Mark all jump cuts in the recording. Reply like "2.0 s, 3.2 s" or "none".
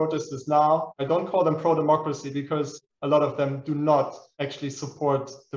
0.9 s, 2.8 s, 4.2 s